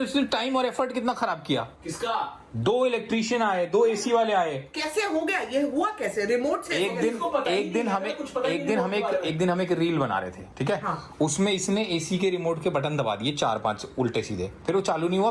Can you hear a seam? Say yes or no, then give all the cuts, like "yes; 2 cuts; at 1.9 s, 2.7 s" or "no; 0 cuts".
no; 0 cuts